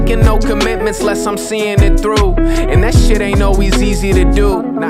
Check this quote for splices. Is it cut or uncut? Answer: uncut